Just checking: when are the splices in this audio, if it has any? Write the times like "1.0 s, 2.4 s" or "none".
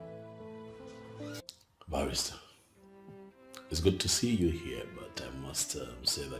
1.4 s